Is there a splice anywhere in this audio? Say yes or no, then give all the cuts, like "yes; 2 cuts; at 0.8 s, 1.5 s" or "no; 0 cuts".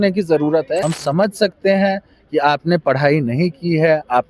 yes; 1 cut; at 0.9 s